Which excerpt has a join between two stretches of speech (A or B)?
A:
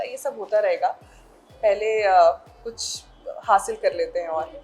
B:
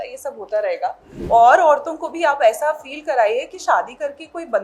B